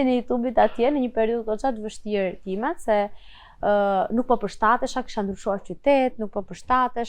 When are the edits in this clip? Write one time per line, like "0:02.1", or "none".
none